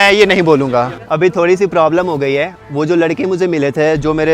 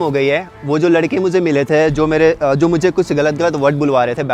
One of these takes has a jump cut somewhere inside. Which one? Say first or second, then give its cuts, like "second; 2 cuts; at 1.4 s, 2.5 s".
first; 1 cut; at 1.0 s